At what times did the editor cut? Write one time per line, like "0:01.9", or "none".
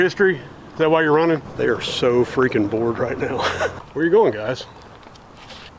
0:01.5
0:03.8